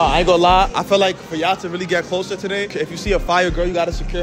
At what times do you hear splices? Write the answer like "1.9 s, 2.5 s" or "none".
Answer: 2.7 s